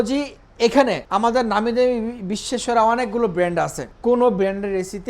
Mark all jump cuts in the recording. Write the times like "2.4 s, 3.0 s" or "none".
1.0 s, 3.8 s